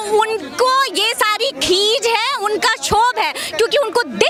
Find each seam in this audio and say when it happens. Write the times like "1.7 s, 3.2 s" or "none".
none